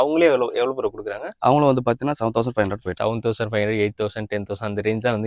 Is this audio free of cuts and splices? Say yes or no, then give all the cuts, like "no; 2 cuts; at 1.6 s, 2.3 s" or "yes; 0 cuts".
no; 1 cut; at 3.0 s